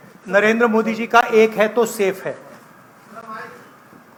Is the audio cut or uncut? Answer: uncut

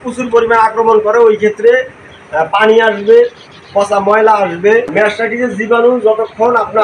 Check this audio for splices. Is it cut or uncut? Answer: cut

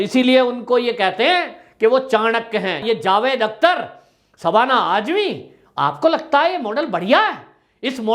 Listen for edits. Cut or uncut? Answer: cut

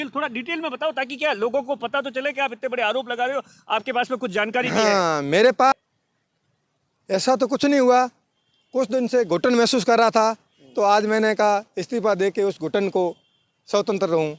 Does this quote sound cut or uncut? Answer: cut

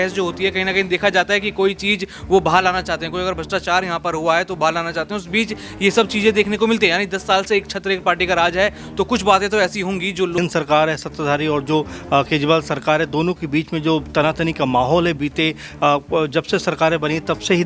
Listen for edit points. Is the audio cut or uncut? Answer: cut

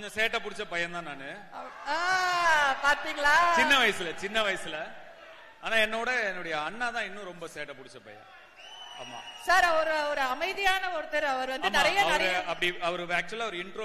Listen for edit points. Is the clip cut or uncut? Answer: uncut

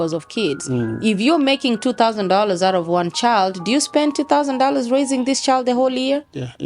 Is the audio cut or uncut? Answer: uncut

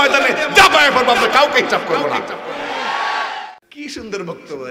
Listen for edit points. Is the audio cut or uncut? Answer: cut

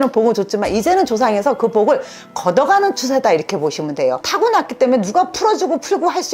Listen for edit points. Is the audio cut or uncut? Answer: cut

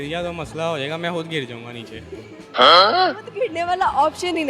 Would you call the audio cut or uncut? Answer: uncut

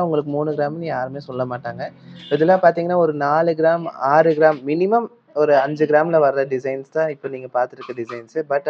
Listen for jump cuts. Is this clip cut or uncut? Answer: uncut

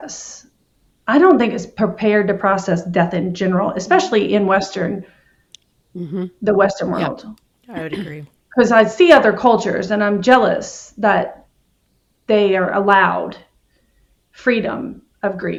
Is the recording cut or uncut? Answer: uncut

